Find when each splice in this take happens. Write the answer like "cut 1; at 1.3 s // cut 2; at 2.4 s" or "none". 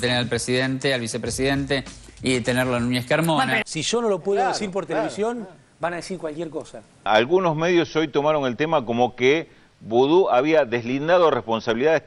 cut 1; at 3.6 s // cut 2; at 7.1 s

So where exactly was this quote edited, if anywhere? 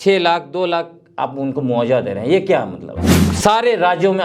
cut 1; at 3.2 s

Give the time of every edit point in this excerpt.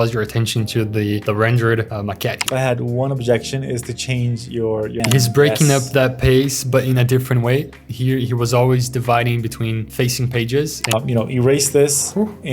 cut 1; at 2.5 s // cut 2; at 4.9 s // cut 3; at 10.9 s

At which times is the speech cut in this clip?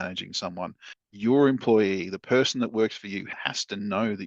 cut 1; at 3.3 s

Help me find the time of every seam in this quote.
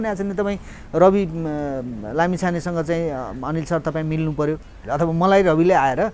cut 1; at 4.7 s

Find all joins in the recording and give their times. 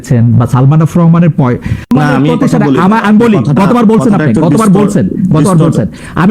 cut 1; at 1.9 s

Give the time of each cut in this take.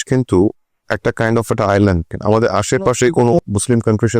cut 1; at 2.1 s // cut 2; at 3.4 s

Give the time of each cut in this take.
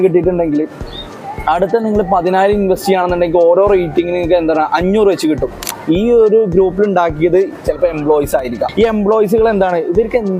cut 1; at 5.7 s // cut 2; at 8.7 s

